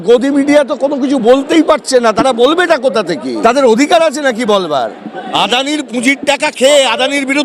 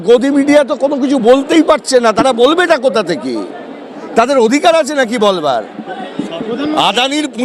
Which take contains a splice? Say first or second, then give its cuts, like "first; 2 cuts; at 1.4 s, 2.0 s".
first; 2 cuts; at 3.3 s, 5.3 s